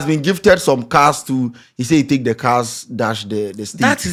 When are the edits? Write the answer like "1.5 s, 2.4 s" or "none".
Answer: none